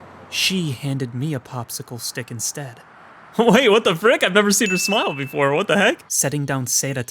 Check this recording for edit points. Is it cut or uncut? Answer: cut